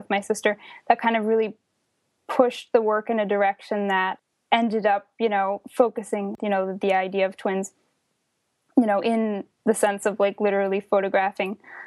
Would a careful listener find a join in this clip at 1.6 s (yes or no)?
no